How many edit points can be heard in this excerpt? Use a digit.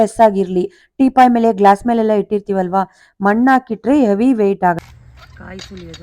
1